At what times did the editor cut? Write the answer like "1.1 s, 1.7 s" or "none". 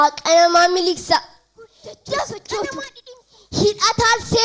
2.9 s